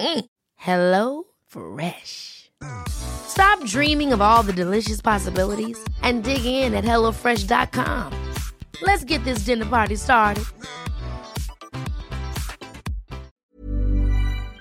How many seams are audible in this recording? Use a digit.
1